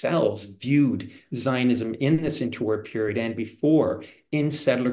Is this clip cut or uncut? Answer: uncut